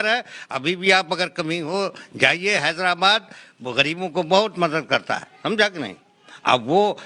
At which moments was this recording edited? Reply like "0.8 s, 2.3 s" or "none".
none

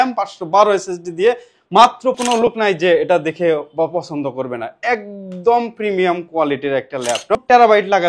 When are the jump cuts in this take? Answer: 2.2 s, 7.4 s

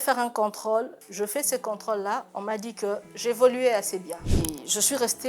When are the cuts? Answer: 4.2 s

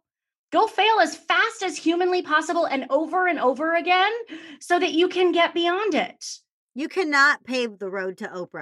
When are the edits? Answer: none

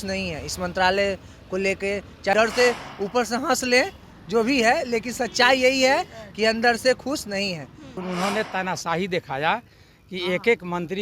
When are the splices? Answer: 2.3 s, 8.0 s

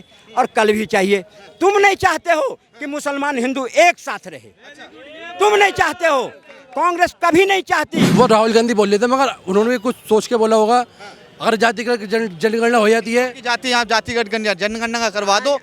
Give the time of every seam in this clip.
8.1 s

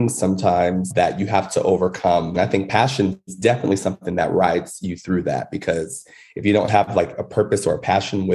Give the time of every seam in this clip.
2.3 s

